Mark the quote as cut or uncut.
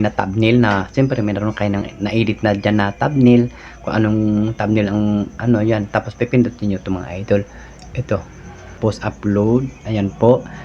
cut